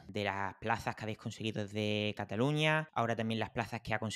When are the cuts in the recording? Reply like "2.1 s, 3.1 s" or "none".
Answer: 2.9 s